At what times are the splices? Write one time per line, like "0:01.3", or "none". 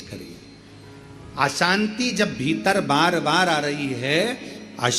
none